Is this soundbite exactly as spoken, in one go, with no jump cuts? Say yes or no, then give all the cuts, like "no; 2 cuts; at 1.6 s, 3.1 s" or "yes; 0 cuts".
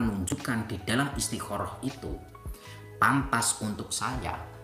yes; 0 cuts